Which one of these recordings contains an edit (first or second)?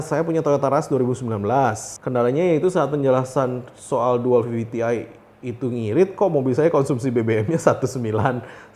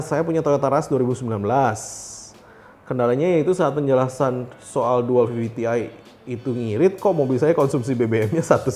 first